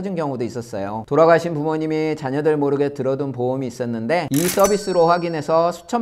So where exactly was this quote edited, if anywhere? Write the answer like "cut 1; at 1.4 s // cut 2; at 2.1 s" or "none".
cut 1; at 1.0 s // cut 2; at 4.3 s